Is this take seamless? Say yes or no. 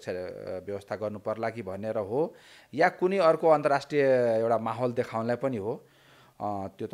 yes